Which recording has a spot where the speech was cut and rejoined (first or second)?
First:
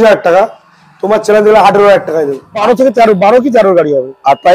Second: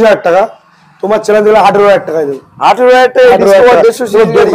first